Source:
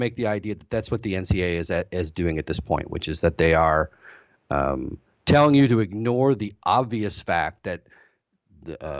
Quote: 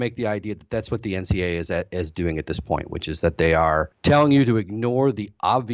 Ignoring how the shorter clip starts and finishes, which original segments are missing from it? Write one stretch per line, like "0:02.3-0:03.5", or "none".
0:03.9-0:05.2